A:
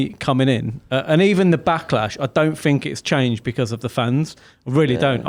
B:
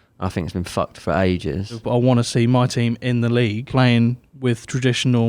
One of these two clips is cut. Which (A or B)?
B